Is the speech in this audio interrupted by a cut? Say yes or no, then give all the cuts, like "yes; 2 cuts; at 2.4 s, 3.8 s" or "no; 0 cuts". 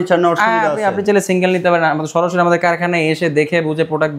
no; 0 cuts